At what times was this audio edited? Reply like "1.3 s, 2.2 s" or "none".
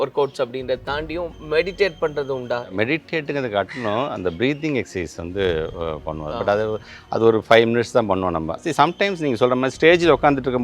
2.7 s, 8.6 s